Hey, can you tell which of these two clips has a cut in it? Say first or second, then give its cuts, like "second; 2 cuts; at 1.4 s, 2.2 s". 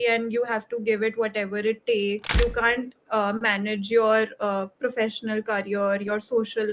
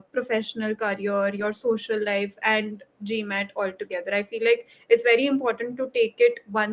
first; 1 cut; at 2.4 s